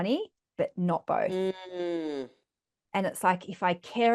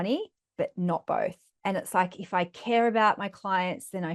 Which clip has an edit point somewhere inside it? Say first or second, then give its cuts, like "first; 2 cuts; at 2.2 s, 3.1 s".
second; 1 cut; at 1.3 s